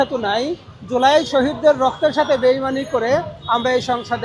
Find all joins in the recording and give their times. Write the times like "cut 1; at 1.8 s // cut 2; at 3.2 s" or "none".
none